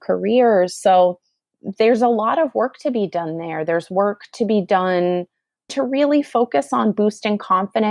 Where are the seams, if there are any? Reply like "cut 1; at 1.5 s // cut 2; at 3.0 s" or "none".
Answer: cut 1; at 5.7 s